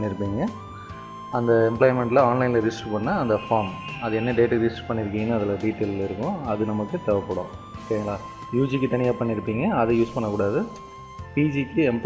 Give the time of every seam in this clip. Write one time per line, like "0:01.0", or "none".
0:05.7